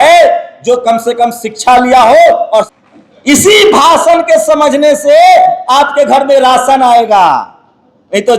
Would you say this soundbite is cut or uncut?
cut